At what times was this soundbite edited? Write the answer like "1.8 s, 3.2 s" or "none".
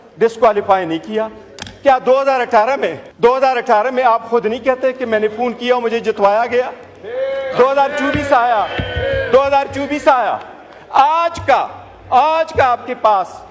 3.0 s